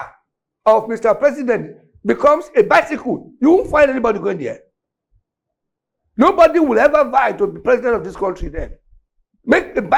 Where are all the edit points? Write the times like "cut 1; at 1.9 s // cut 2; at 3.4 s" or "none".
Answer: none